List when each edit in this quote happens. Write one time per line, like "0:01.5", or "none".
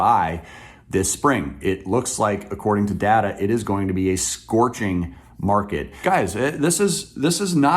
0:05.9